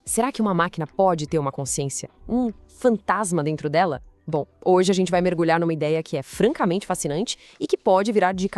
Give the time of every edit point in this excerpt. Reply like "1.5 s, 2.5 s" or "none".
none